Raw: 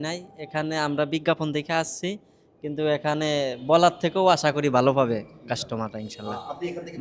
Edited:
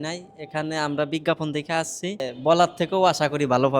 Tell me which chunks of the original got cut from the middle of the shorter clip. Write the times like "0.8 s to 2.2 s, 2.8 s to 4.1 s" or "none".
2.3 s to 3.5 s